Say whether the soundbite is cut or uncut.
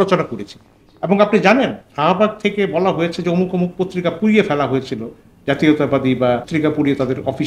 cut